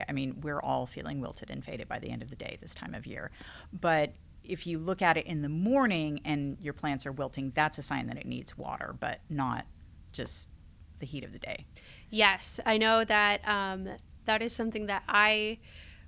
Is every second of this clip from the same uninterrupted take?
yes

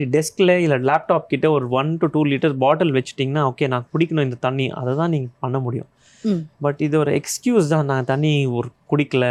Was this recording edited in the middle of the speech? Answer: no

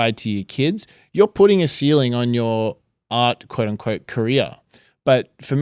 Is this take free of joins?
yes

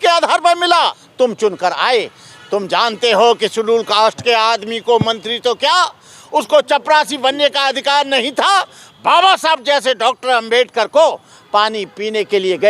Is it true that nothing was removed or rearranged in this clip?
no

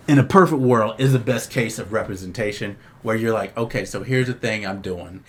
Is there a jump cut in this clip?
no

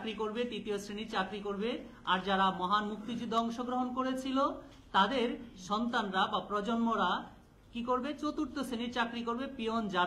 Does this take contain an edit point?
no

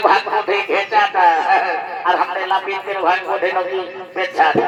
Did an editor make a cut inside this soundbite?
no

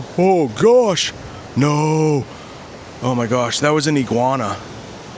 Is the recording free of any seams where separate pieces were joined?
yes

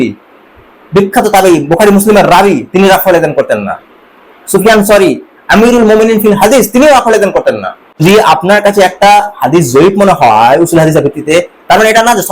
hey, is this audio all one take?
no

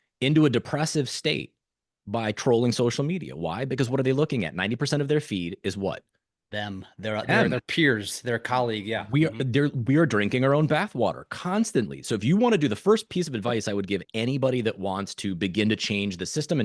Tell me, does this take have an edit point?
no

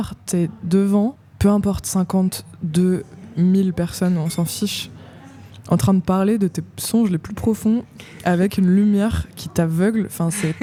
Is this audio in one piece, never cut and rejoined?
yes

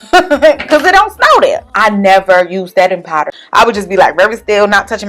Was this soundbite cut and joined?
yes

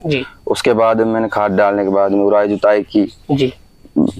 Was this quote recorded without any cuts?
yes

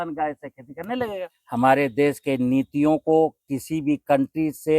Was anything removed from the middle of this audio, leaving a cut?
yes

